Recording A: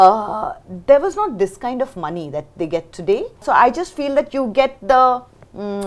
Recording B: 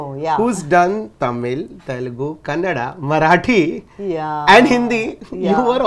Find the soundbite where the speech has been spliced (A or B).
A